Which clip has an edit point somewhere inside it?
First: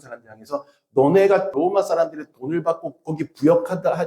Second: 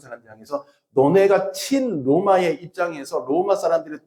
first; 1 cut; at 1.5 s

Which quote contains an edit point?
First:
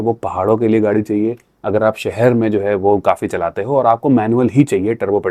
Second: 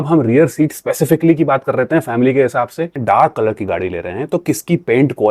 second; 1 cut; at 3.0 s

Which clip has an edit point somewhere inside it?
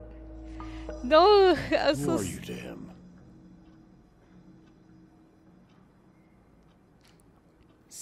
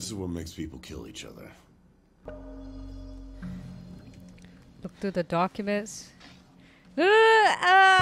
second; 1 cut; at 2.2 s

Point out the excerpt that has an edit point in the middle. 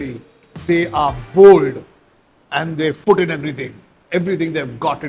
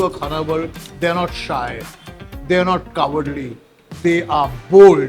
first; 1 cut; at 3.0 s

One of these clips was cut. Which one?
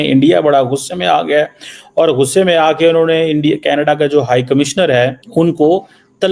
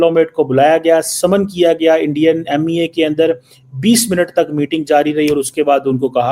first; 1 cut; at 5.2 s

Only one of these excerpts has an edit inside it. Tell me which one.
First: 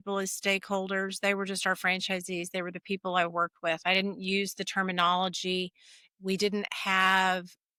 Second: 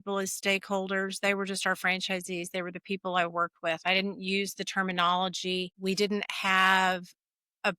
second; 1 cut; at 5.7 s

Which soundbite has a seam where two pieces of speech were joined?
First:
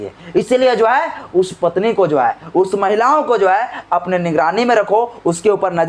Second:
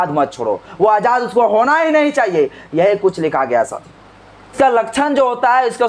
second; 1 cut; at 4.5 s

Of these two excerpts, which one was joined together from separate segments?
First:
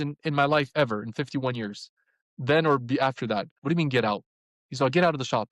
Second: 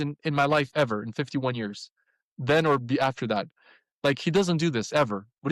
first; 1 cut; at 3.5 s

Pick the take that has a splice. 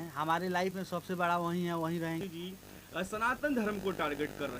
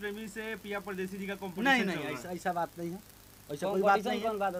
first; 1 cut; at 2.2 s

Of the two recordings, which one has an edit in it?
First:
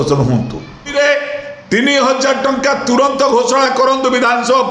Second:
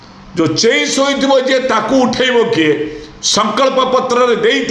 first; 1 cut; at 0.9 s

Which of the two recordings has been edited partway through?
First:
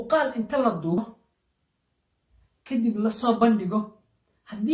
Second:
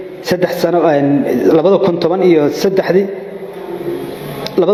first; 1 cut; at 1.0 s

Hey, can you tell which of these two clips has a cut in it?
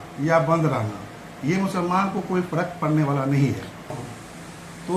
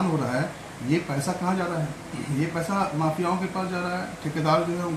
first; 1 cut; at 3.9 s

